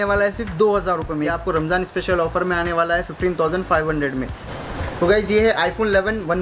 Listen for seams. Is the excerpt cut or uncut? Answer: cut